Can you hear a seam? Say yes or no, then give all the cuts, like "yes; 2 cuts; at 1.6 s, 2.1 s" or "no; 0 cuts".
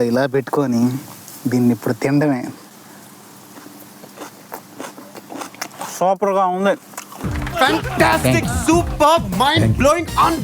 yes; 1 cut; at 7.3 s